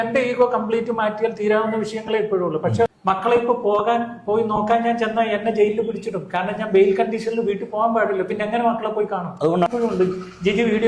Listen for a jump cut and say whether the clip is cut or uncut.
cut